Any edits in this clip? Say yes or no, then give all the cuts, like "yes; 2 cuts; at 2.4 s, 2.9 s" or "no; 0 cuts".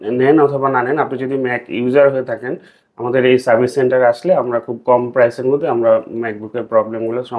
no; 0 cuts